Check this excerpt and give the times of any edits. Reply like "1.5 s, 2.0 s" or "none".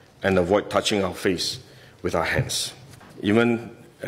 3.0 s